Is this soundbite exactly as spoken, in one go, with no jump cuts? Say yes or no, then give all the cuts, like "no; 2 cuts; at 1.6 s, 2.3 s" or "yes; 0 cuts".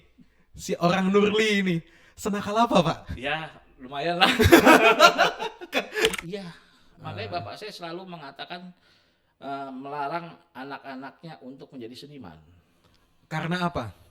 no; 1 cut; at 6.2 s